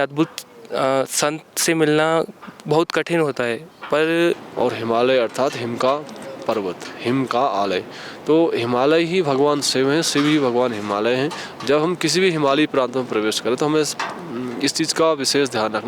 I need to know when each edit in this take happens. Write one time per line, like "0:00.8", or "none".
0:04.5

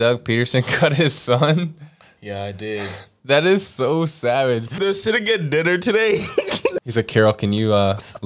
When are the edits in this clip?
0:04.8
0:06.8

